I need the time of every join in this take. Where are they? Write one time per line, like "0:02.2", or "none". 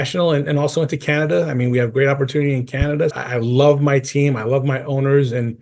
0:03.2